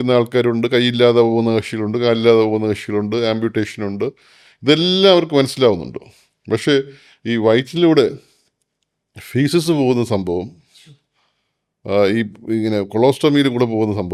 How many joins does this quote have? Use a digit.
0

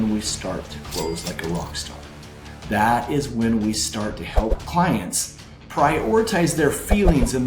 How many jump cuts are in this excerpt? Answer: 1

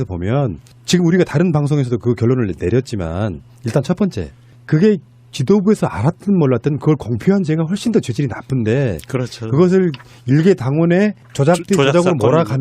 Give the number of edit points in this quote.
1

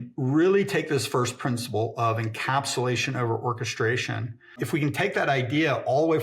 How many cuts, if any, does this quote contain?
1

